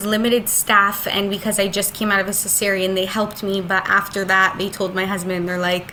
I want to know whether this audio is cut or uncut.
uncut